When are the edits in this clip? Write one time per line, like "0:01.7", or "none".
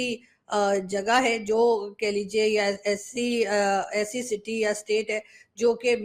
none